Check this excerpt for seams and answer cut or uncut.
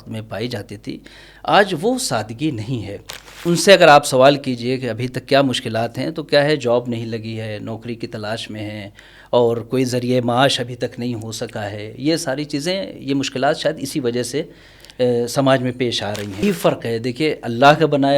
cut